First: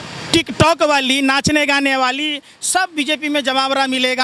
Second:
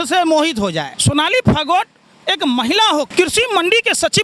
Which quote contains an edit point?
second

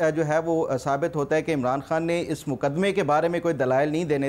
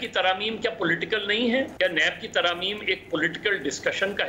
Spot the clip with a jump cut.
second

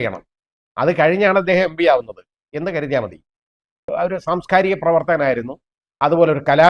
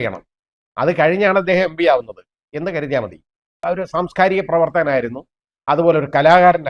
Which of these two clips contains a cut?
second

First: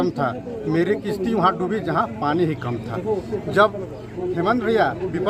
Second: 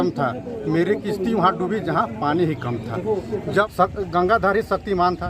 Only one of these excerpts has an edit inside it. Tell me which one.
second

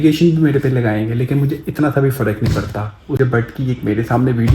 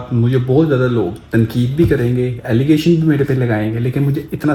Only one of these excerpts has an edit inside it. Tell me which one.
first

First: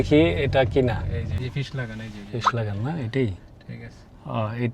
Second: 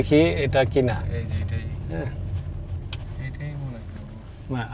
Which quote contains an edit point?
first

